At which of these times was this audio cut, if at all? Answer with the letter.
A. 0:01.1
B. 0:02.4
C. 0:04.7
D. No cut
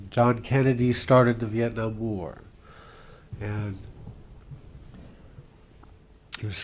B